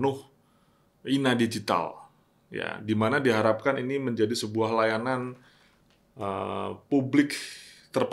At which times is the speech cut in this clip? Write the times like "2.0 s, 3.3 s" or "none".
none

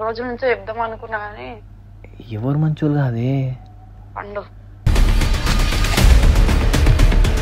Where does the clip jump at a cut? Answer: none

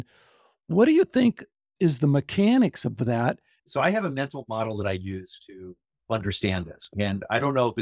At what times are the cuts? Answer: 1.7 s, 3.5 s, 6.9 s

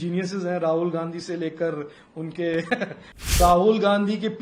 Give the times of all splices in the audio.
3.4 s

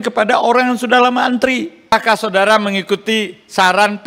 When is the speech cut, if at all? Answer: 1.9 s

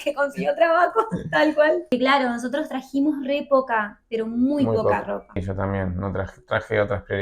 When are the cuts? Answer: 1.9 s, 5.4 s

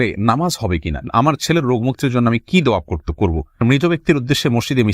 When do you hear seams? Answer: 1.0 s, 3.6 s

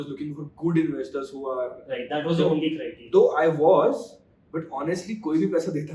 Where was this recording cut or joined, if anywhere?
none

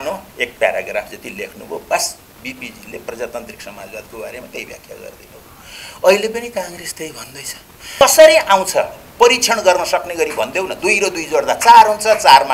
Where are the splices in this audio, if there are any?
8.0 s

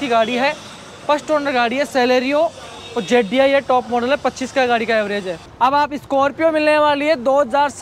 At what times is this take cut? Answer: 5.4 s

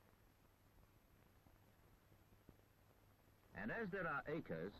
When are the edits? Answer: 1.4 s

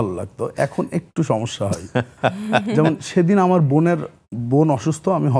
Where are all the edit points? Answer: none

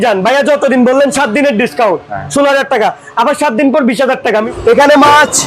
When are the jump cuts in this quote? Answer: 4.4 s

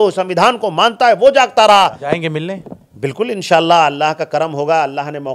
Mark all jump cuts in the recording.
2.0 s

